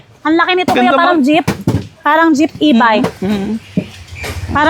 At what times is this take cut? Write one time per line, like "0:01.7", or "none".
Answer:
none